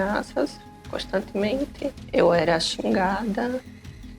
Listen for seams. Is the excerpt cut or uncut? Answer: cut